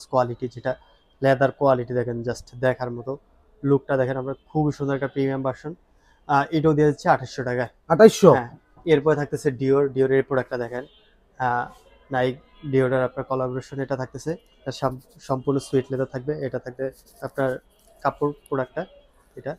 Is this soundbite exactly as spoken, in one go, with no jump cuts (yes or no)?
yes